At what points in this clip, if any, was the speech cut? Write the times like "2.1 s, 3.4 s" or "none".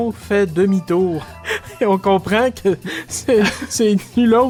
none